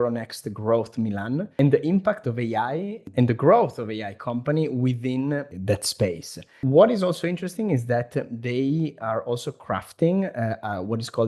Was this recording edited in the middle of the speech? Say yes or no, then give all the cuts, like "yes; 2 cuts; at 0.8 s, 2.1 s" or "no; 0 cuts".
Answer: yes; 4 cuts; at 1.5 s, 3.0 s, 5.5 s, 6.6 s